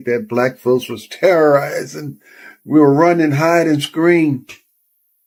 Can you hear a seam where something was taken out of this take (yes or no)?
no